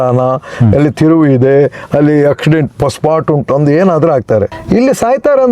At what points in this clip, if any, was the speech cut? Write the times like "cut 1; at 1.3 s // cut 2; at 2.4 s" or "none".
cut 1; at 4.6 s